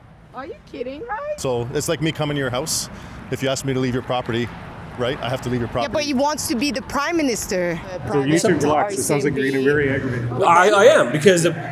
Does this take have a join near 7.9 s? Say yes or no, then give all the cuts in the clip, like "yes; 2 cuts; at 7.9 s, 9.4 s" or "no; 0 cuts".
yes; 2 cuts; at 1.4 s, 7.9 s